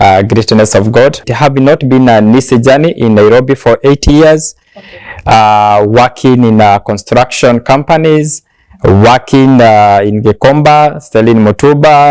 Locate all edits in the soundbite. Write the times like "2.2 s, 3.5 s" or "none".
1.2 s

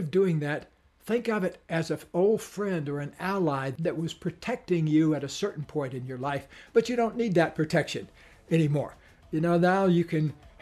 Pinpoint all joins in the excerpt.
3.7 s

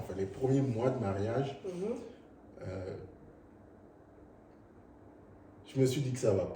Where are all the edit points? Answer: none

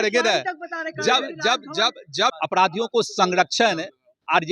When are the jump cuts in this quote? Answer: 2.4 s

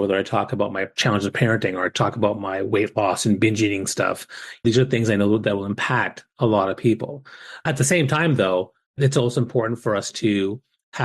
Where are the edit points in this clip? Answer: 0.9 s, 4.6 s, 7.6 s, 9.0 s

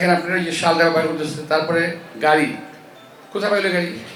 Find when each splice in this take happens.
none

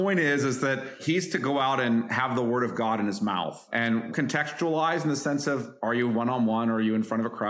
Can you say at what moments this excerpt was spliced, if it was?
0.9 s, 2.1 s, 4.1 s

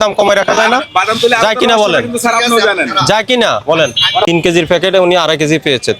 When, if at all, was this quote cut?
4.3 s

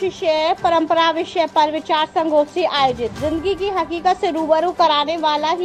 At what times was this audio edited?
none

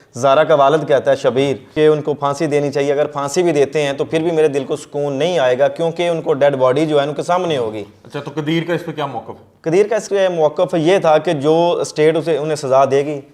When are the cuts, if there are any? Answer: 1.6 s, 10.1 s

